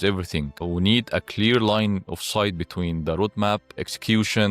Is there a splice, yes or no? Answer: no